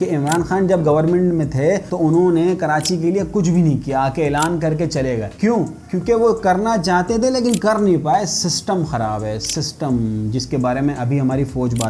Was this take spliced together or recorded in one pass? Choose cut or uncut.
uncut